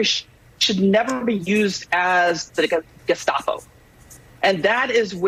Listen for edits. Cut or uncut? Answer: uncut